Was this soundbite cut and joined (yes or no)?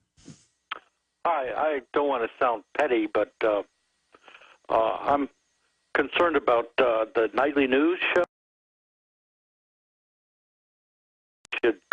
no